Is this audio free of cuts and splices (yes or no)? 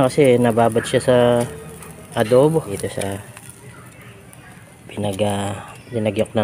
no